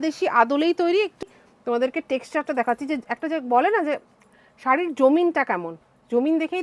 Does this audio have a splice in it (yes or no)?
yes